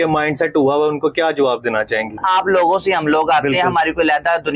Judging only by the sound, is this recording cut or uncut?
cut